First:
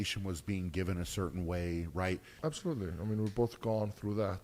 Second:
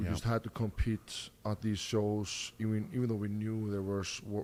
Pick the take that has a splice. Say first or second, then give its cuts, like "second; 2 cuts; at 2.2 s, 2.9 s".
first; 1 cut; at 2.3 s